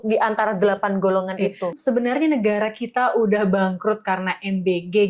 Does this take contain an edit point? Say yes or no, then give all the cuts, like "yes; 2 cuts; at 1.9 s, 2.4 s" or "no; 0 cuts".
yes; 1 cut; at 1.7 s